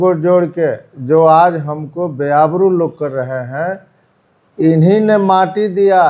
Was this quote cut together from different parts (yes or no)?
no